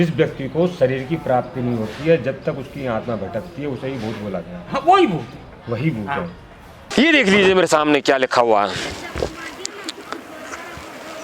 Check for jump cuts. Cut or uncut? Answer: cut